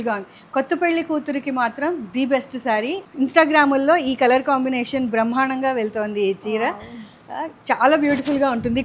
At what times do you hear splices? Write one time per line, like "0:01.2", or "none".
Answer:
0:03.0